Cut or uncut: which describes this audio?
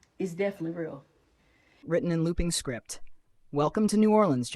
cut